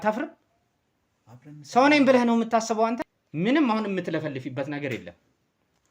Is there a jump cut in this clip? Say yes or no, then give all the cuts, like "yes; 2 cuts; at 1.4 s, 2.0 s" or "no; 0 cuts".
yes; 1 cut; at 3.1 s